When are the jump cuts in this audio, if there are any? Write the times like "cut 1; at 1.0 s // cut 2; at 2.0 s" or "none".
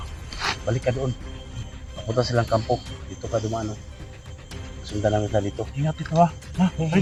none